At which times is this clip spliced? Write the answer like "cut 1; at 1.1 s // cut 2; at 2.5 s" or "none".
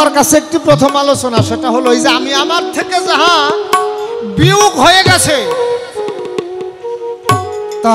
none